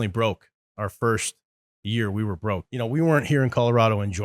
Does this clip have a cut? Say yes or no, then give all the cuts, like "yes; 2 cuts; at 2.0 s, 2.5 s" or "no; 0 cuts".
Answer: yes; 1 cut; at 2.7 s